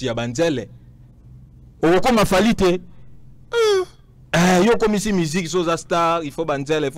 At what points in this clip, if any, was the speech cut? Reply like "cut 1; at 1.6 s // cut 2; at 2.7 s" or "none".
none